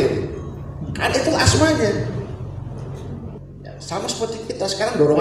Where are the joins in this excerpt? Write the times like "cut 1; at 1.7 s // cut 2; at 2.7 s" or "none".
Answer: cut 1; at 3.4 s